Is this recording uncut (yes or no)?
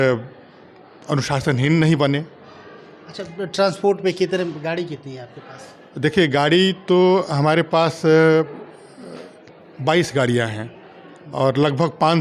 yes